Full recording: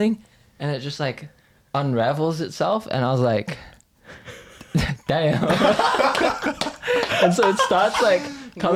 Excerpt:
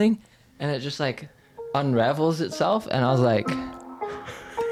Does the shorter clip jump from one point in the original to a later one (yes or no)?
no